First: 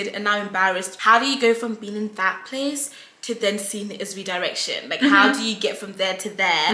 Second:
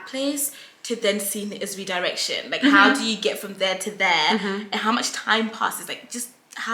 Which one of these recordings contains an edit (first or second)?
first